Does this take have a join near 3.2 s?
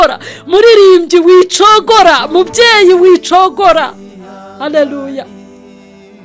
no; 1 cut; at 5.3 s

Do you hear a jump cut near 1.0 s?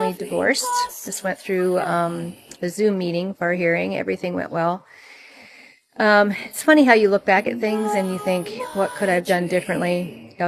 no; 0 cuts

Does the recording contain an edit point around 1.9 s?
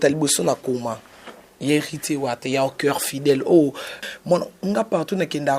no; 1 cut; at 4.0 s

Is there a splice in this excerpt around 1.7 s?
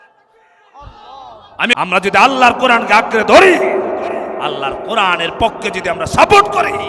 yes; 1 cut; at 1.7 s

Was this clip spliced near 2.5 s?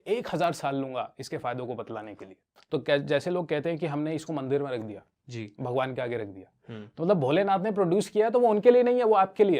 yes; 1 cut; at 2.5 s

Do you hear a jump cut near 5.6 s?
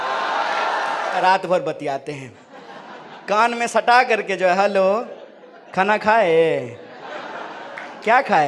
no; 1 cut; at 1.1 s

